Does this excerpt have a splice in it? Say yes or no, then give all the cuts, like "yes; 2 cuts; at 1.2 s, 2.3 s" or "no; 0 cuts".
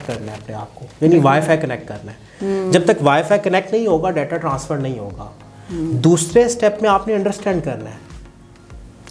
no; 0 cuts